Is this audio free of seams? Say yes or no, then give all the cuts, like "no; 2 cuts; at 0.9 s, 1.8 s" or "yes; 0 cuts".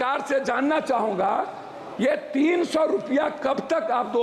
yes; 0 cuts